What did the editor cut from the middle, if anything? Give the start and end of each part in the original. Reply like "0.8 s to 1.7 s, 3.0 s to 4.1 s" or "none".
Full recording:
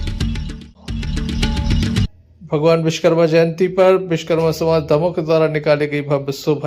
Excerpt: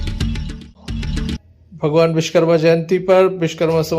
1.4 s to 2.1 s